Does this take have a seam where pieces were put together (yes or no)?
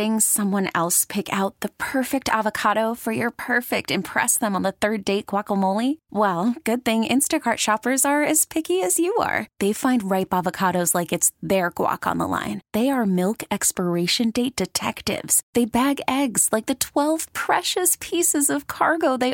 no